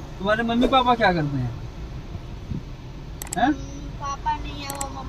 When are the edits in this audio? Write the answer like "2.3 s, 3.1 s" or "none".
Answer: none

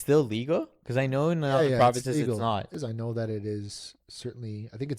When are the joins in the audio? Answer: 2.7 s

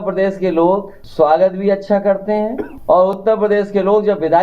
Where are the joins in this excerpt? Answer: 1.0 s, 2.7 s

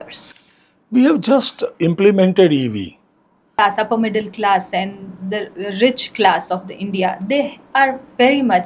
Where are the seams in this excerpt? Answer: 3.6 s

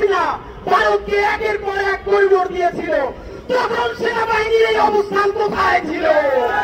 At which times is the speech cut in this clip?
none

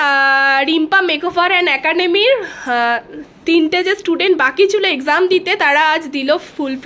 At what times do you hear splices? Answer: none

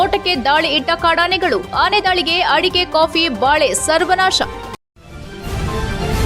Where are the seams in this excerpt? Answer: 4.6 s

